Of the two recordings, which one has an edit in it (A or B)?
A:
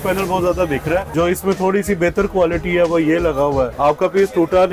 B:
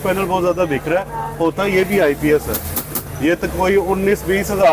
A